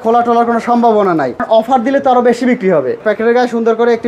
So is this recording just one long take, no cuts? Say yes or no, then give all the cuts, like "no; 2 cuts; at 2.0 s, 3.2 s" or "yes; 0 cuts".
no; 2 cuts; at 1.4 s, 3.0 s